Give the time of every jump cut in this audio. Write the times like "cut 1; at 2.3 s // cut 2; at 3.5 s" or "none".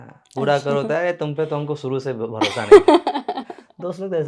none

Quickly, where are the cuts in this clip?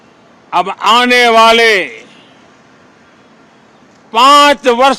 none

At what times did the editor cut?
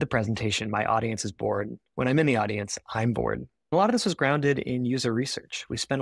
cut 1; at 3.7 s

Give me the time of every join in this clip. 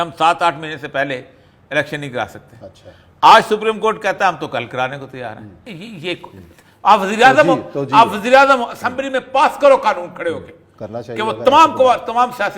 cut 1; at 5.7 s

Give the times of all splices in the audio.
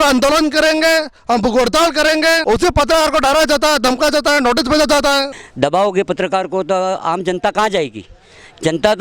cut 1; at 2.4 s // cut 2; at 5.4 s

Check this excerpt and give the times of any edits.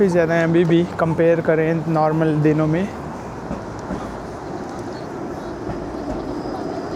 none

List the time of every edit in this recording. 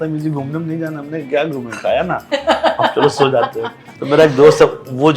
cut 1; at 3.9 s

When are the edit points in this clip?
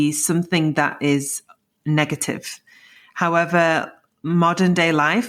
none

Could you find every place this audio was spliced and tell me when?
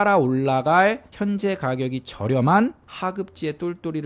cut 1; at 1.1 s // cut 2; at 2.9 s

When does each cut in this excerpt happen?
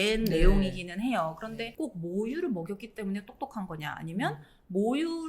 cut 1; at 1.7 s

